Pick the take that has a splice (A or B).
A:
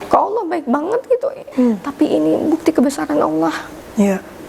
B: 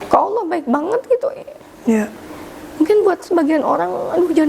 A